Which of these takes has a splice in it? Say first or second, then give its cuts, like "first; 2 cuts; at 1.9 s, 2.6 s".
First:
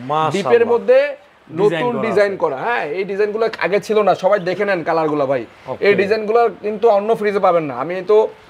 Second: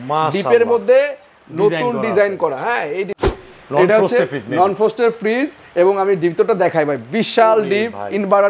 second; 1 cut; at 3.1 s